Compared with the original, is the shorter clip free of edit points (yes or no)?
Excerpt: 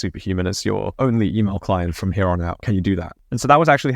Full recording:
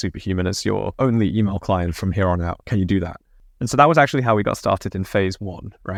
no